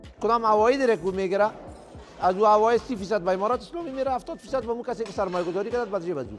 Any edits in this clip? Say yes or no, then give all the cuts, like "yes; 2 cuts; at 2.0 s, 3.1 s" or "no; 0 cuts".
no; 0 cuts